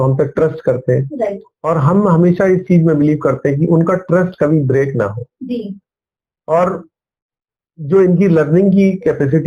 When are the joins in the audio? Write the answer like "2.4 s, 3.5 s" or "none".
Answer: none

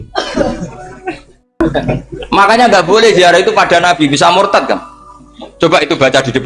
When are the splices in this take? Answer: 1.4 s

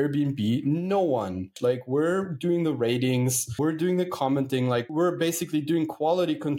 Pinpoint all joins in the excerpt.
1.5 s, 3.6 s, 4.9 s

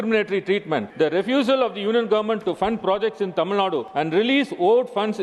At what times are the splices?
0.9 s, 3.9 s

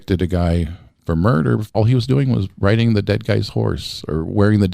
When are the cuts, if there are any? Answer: 1.7 s

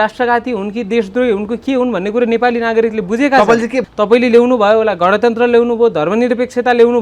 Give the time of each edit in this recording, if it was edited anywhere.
3.8 s

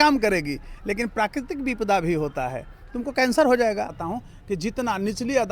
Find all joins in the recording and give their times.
4.0 s

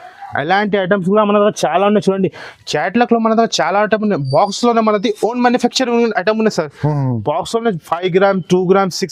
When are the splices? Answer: none

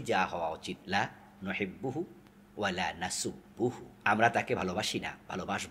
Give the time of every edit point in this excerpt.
0.8 s, 3.9 s

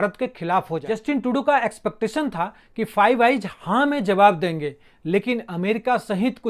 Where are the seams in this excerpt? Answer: 0.9 s

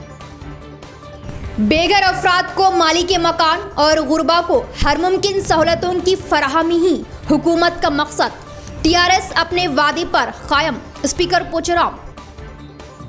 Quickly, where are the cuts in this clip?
1.0 s

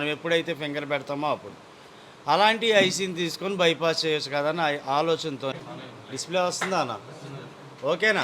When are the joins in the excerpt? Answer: 5.6 s

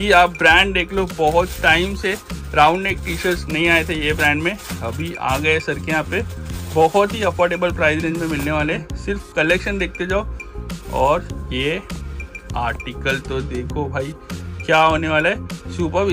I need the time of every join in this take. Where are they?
none

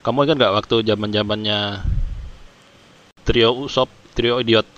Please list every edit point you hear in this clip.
3.0 s

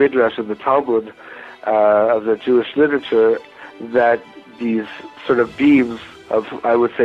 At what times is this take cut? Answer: none

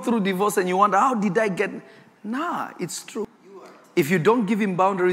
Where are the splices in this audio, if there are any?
3.3 s

